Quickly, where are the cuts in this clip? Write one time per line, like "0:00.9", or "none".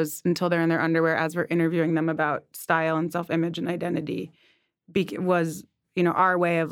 none